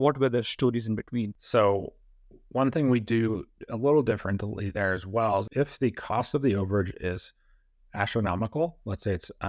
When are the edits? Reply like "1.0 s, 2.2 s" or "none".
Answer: 1.4 s, 5.5 s